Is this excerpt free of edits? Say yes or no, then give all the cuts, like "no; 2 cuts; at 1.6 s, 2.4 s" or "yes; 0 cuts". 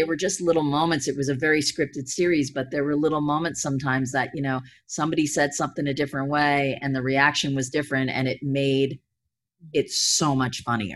yes; 0 cuts